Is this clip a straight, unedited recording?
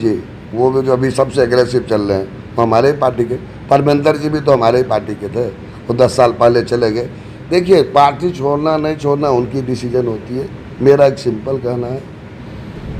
yes; 0 cuts

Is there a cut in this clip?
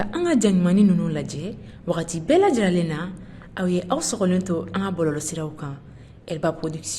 no; 0 cuts

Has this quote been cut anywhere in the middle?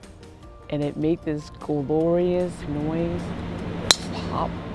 no; 0 cuts

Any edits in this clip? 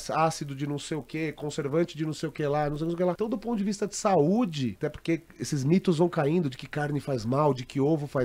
yes; 2 cuts; at 3.2 s, 4.8 s

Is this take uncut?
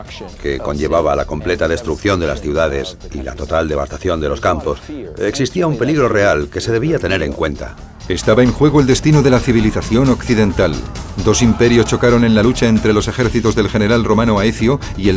yes; 0 cuts

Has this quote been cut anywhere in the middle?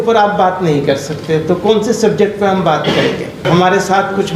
yes; 1 cut; at 3.4 s

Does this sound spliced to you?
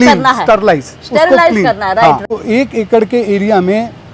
yes; 1 cut; at 2.2 s

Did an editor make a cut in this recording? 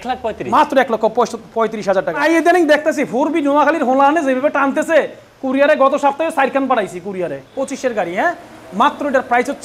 yes; 2 cuts; at 2.2 s, 7.5 s

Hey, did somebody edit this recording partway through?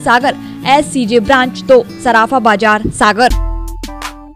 yes; 1 cut; at 3.3 s

